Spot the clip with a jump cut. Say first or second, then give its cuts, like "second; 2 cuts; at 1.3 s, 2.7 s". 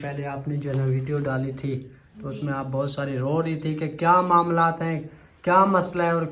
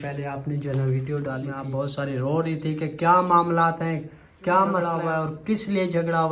second; 2 cuts; at 1.5 s, 4.9 s